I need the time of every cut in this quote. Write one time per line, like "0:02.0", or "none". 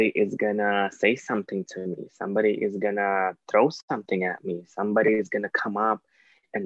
none